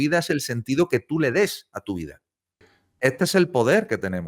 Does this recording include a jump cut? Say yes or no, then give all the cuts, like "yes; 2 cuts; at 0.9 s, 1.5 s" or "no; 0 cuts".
yes; 1 cut; at 2.8 s